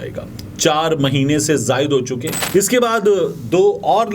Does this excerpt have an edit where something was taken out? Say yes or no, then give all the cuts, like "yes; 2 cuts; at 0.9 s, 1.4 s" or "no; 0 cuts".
yes; 1 cut; at 2.3 s